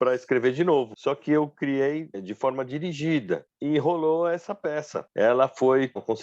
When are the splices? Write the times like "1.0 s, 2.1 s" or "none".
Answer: 0.9 s, 2.2 s, 3.5 s, 5.0 s